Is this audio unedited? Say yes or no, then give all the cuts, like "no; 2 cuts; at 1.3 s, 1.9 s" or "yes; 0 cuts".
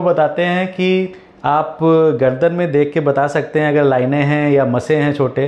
yes; 0 cuts